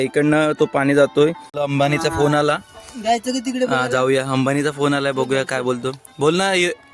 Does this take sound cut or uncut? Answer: cut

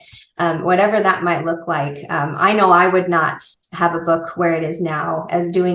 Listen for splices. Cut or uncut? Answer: uncut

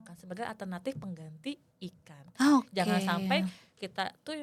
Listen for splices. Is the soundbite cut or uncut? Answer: uncut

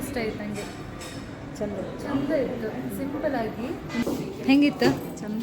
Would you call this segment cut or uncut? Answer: cut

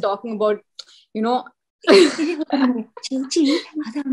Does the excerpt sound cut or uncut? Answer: cut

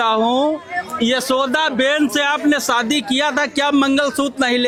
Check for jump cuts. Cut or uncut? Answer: uncut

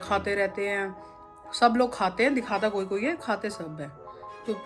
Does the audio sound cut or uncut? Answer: uncut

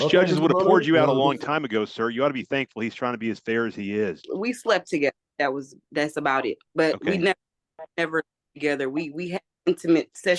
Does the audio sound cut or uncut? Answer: cut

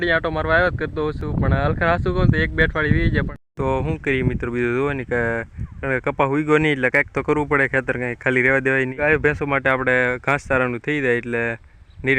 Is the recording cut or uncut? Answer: cut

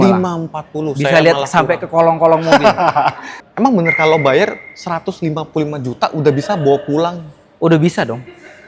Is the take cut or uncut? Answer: cut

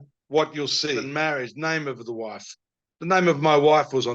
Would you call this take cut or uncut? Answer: cut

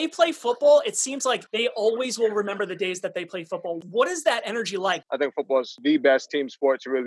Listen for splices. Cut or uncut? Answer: cut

